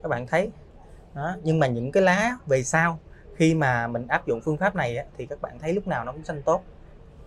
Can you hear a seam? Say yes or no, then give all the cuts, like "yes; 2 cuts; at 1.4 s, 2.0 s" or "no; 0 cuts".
no; 0 cuts